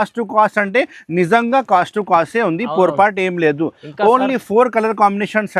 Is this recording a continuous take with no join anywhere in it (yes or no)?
yes